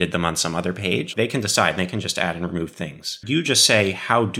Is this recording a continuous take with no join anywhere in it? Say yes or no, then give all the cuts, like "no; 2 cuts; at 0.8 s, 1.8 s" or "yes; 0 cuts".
no; 2 cuts; at 1.1 s, 3.2 s